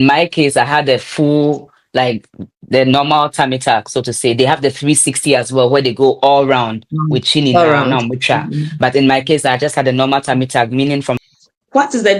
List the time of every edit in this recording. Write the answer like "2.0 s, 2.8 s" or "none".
11.2 s